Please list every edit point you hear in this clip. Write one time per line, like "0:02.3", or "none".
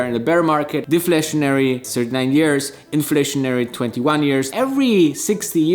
0:00.8
0:04.5